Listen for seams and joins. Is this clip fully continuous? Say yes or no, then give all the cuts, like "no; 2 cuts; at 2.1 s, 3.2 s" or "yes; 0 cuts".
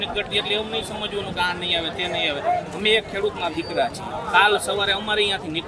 yes; 0 cuts